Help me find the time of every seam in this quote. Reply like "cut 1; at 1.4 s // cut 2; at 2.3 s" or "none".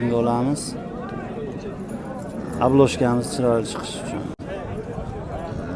cut 1; at 4.4 s